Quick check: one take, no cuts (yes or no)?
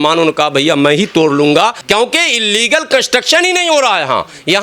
no